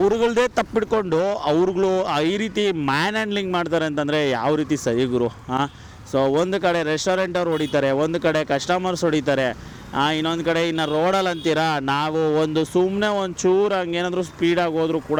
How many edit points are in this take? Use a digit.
0